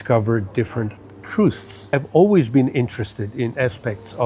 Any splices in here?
yes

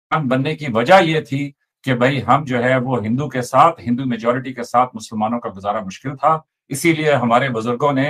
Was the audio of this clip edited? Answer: no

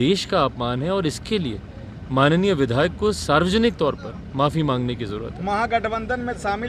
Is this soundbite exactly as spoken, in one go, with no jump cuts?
yes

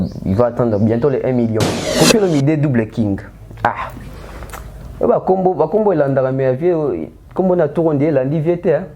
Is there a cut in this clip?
yes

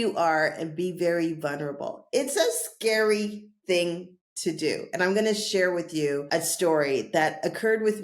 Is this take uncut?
no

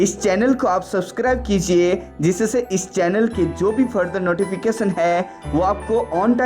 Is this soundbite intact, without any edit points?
yes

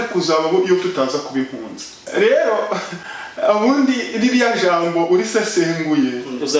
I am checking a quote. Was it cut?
yes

